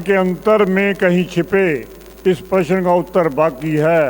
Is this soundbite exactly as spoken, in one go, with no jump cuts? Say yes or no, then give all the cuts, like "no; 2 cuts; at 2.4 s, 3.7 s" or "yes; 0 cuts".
yes; 0 cuts